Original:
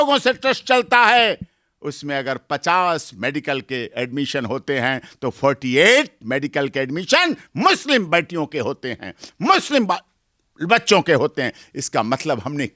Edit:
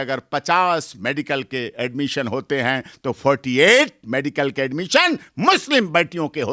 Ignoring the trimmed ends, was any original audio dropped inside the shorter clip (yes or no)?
no